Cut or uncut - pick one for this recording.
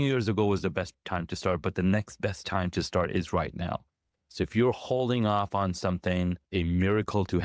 cut